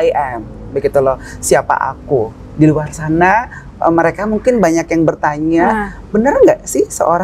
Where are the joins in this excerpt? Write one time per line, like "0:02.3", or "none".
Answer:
none